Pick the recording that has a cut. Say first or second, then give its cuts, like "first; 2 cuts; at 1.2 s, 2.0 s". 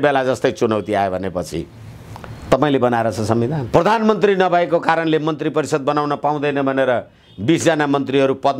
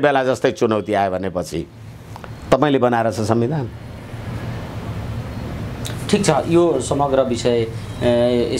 first; 1 cut; at 3.6 s